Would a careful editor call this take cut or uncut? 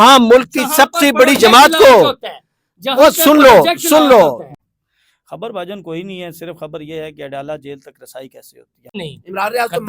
cut